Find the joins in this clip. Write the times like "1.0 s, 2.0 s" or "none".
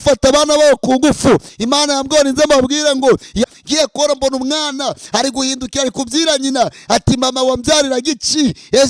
3.5 s